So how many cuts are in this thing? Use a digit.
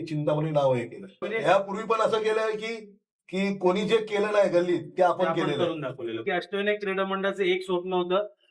2